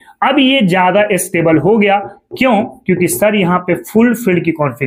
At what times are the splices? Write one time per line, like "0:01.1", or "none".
none